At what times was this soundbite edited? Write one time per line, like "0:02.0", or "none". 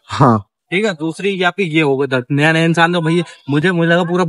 none